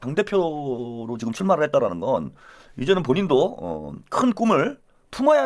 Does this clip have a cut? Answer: no; 0 cuts

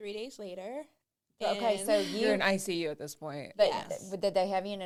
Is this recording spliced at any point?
no; 0 cuts

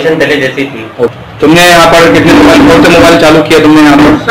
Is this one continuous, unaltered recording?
no; 1 cut; at 1.1 s

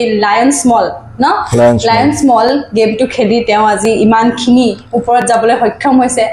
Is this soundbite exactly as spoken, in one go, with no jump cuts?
yes; 0 cuts

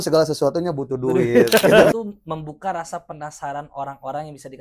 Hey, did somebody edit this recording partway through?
yes; 1 cut; at 1.9 s

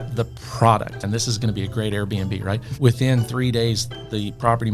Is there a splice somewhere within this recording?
yes; 2 cuts; at 1.0 s, 2.7 s

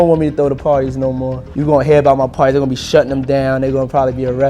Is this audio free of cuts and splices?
no; 1 cut; at 1.5 s

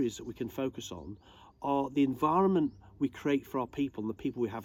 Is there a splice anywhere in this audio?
no; 0 cuts

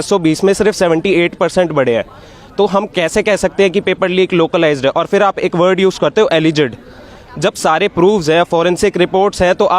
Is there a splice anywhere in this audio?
no; 0 cuts

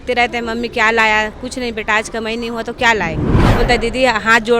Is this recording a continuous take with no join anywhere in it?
no; 1 cut; at 3.4 s

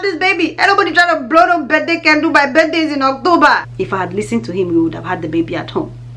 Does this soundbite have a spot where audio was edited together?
yes; 1 cut; at 3.7 s

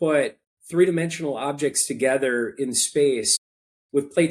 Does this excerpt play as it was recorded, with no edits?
yes; 0 cuts

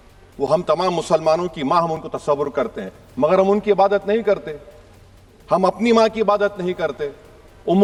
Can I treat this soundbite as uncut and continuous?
yes; 0 cuts

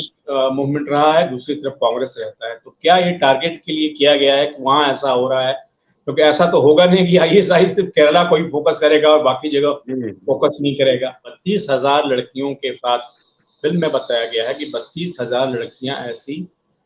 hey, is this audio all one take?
no; 1 cut; at 11.3 s

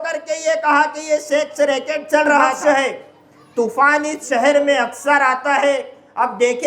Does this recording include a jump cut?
yes; 1 cut; at 2.5 s

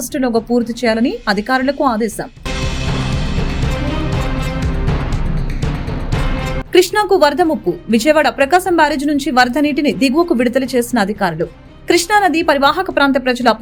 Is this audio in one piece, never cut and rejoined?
yes; 0 cuts

